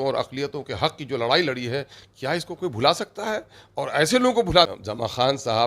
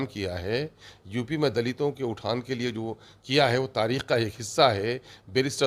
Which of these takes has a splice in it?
first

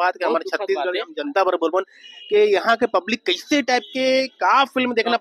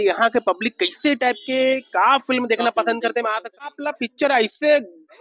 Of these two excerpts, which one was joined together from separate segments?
second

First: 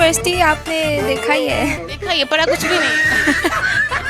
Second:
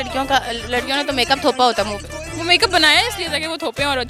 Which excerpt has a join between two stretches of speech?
first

